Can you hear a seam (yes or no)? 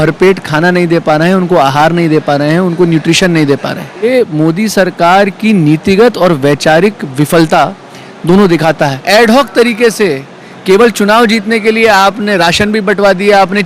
yes